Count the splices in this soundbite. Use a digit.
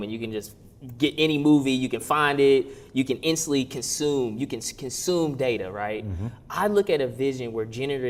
0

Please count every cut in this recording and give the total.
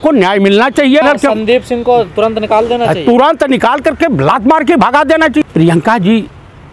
2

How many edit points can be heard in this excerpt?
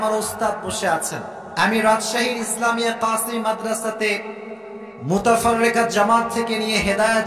1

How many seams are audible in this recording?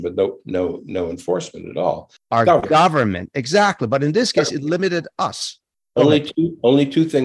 1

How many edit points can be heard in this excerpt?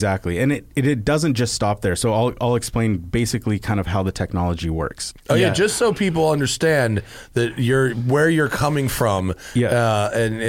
1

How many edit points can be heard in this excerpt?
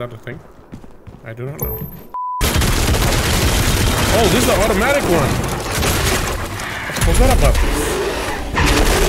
1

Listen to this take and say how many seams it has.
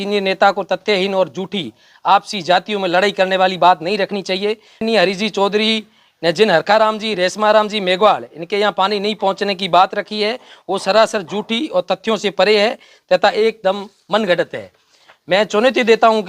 1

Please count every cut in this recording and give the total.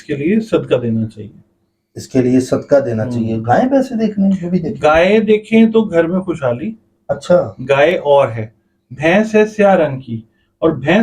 0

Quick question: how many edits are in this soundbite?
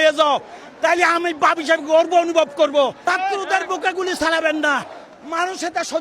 1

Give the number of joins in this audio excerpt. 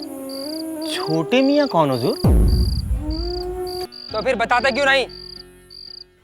1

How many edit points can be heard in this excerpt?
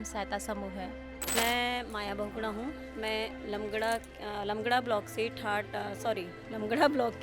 1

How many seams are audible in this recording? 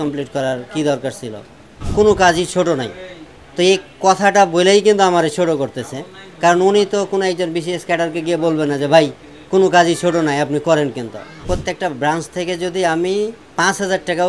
3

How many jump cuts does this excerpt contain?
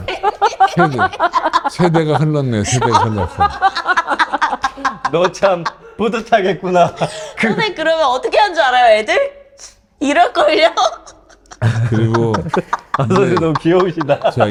0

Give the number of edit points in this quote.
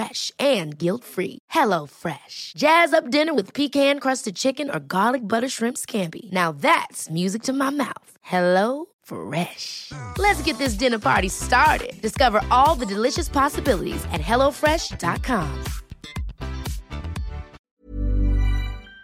1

